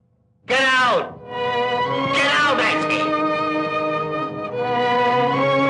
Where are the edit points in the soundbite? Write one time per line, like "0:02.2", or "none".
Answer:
none